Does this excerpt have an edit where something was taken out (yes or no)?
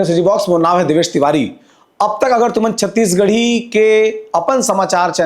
no